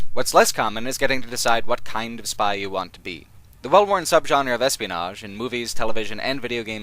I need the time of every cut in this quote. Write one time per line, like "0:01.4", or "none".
0:01.1